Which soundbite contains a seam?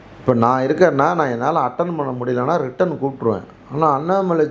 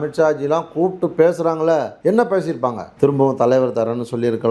second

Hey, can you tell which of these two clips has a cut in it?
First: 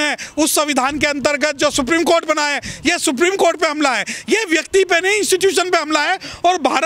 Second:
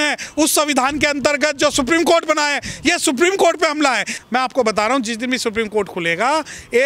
second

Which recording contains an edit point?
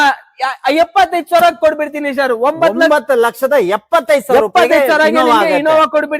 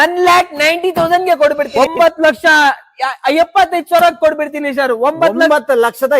second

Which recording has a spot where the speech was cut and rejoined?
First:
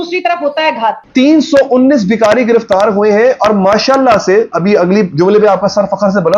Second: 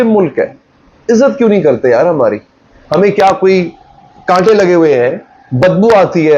first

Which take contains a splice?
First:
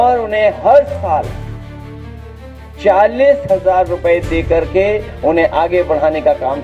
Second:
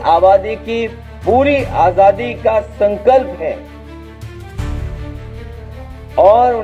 first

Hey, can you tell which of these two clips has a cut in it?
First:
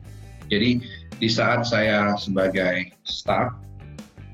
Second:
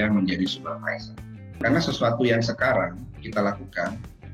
second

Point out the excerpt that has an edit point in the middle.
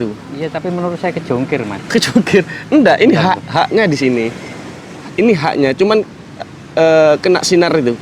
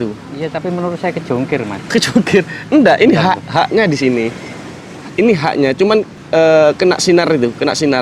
second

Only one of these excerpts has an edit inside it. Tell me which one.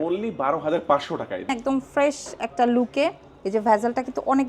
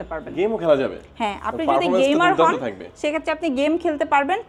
first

